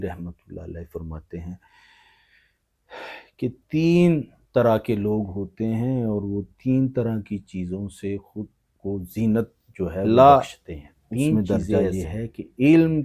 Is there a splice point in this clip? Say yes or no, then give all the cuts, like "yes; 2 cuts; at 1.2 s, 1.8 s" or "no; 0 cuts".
yes; 1 cut; at 10.0 s